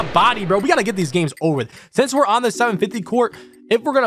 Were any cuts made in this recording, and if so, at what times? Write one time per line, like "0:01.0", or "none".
none